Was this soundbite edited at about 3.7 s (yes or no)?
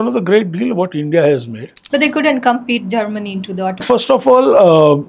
yes